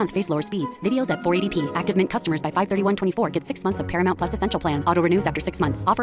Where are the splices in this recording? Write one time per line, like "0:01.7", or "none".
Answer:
none